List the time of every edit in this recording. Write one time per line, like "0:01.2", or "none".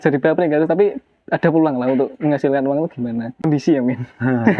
0:03.4